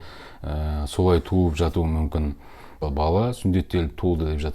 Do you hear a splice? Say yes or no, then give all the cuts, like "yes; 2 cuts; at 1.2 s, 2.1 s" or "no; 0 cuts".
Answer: yes; 1 cut; at 2.8 s